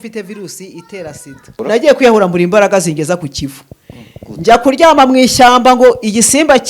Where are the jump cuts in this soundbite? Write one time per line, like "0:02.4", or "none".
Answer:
0:01.6